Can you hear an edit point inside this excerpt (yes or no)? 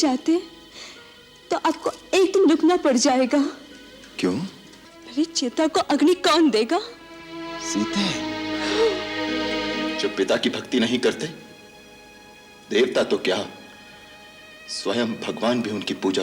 yes